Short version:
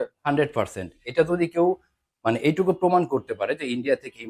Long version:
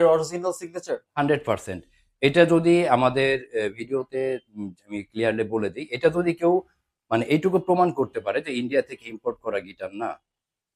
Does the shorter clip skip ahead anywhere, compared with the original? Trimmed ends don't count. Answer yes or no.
yes